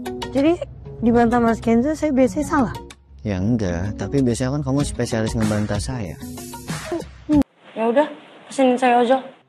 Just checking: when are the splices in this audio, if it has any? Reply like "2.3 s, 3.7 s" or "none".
7.4 s